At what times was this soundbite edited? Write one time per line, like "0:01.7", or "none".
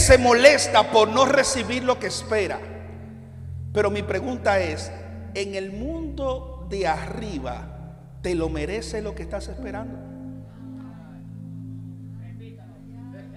none